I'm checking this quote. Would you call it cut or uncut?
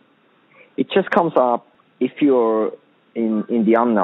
cut